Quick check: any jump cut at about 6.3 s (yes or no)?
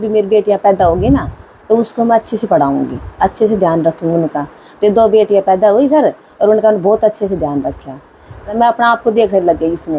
no